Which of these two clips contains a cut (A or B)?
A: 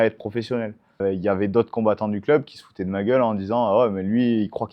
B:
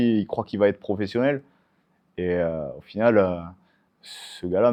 A